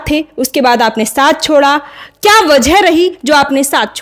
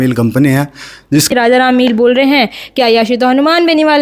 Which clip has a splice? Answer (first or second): second